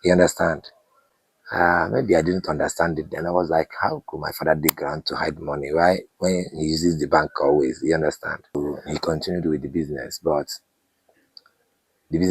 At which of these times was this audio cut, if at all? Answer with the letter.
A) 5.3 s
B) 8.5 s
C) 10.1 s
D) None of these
B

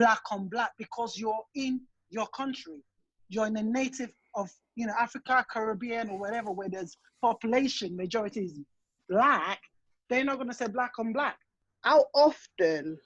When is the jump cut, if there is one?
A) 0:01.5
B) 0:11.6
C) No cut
B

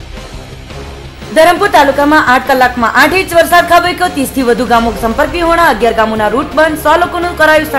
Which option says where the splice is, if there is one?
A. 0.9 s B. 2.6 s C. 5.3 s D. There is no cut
A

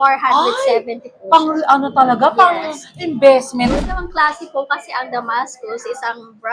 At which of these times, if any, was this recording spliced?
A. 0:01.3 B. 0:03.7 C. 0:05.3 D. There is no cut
B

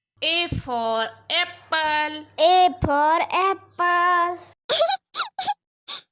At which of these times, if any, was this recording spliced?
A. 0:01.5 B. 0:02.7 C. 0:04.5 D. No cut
C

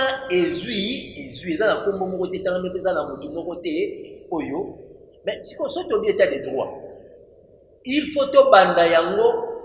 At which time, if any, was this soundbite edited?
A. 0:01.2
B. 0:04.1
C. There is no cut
C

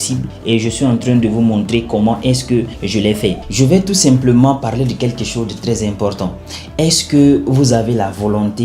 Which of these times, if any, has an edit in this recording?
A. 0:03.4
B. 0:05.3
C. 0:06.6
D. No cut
A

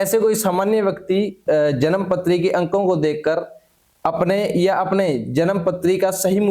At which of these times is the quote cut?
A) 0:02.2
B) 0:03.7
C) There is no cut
C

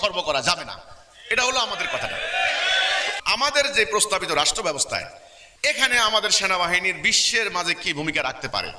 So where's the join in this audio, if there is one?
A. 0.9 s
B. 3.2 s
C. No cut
C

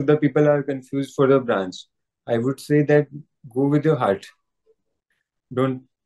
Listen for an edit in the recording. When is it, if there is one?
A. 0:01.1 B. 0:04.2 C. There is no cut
C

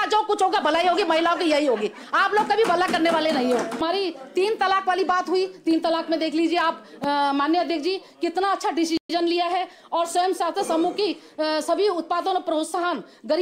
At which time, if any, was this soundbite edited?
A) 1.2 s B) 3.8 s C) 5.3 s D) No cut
B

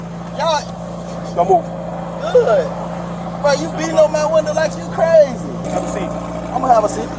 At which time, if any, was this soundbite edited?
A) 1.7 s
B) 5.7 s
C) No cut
B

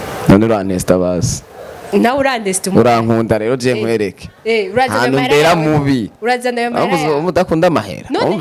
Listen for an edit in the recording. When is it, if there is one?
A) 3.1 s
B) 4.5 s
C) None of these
C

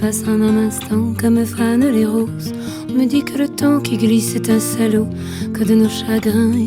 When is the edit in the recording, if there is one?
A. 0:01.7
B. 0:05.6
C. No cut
C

